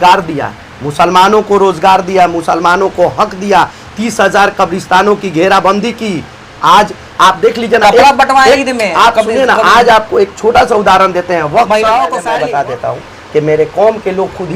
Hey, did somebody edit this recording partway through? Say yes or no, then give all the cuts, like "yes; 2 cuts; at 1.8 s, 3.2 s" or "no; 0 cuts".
yes; 1 cut; at 12.3 s